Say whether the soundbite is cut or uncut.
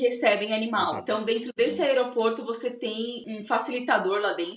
cut